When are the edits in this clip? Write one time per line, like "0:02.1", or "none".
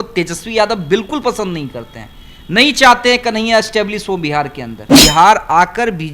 0:04.8